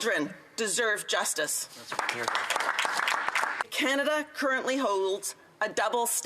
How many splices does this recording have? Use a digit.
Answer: 1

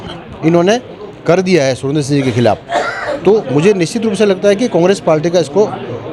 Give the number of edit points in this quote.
0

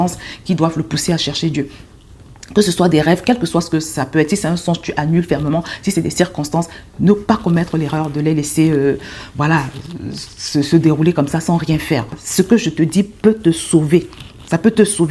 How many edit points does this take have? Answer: 1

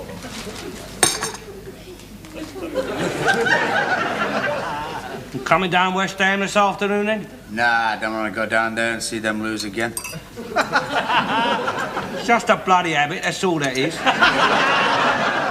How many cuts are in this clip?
1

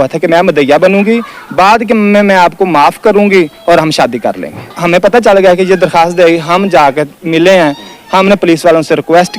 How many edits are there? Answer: 1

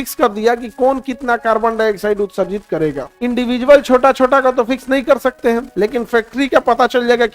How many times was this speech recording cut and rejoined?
2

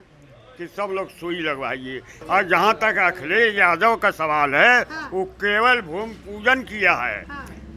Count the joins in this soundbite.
1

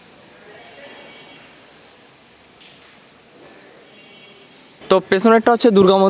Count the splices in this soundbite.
1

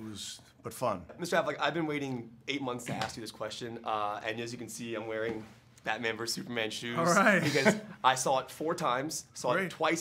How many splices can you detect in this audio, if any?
1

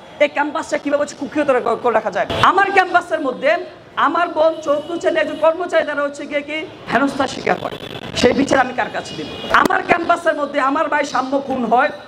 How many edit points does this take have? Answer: 3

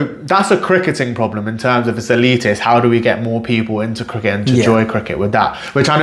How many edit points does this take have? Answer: 0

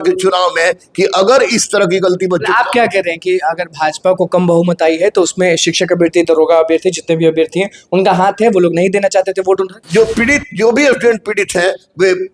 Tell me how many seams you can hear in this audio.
1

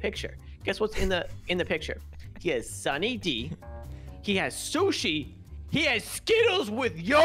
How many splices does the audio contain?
0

